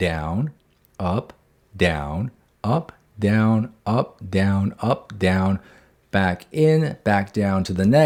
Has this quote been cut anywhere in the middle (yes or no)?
no